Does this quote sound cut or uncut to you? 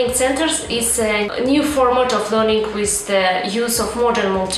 cut